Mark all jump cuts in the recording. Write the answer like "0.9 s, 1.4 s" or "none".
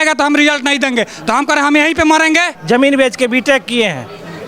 2.5 s

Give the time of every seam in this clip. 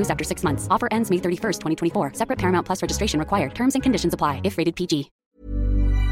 5.2 s

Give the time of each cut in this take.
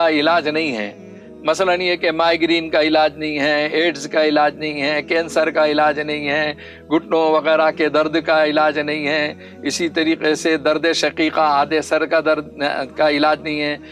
none

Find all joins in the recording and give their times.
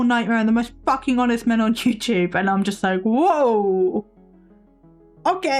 none

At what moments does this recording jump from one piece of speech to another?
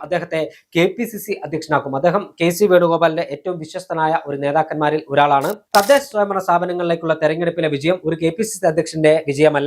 5.6 s

